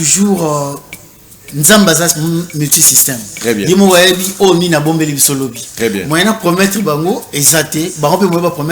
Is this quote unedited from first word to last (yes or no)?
yes